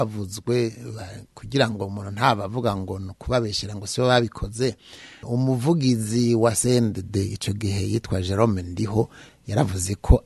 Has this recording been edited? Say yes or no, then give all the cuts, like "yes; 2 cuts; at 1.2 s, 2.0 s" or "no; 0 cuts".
no; 0 cuts